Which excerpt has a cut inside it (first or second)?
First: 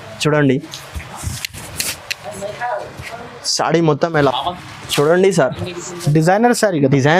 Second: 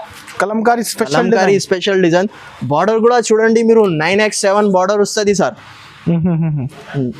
first